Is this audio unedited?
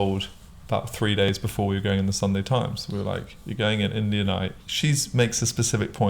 no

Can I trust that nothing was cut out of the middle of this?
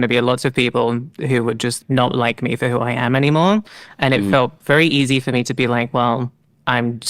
no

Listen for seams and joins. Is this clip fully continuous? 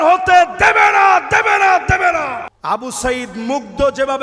no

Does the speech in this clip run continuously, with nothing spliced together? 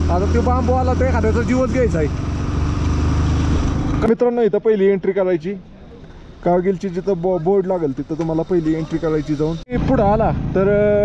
no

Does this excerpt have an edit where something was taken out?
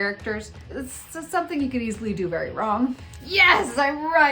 yes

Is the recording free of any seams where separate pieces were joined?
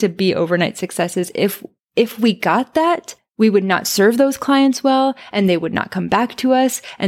yes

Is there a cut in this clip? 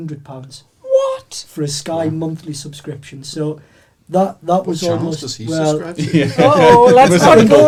no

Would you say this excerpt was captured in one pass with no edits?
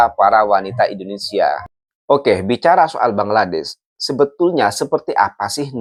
yes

